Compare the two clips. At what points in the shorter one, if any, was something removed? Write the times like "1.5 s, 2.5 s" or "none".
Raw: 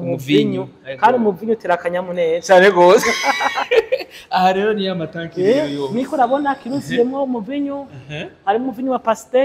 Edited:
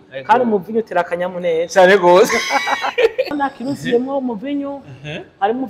3.4 s